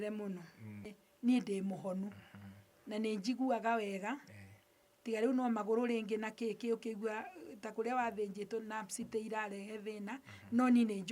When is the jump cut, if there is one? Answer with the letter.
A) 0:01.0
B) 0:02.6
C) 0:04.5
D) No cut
A